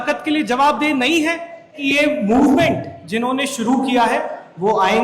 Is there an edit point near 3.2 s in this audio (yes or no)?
no